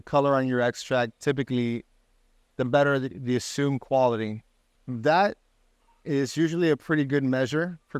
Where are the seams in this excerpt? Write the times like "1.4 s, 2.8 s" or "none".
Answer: none